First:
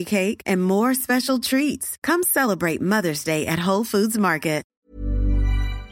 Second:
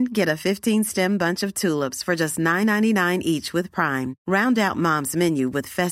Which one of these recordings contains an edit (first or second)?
first